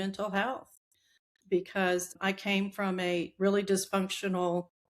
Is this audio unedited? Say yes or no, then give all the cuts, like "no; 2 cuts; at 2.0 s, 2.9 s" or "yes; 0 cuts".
no; 1 cut; at 2.2 s